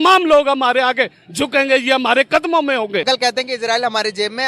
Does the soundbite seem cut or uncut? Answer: cut